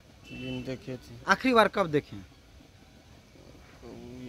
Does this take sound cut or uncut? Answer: uncut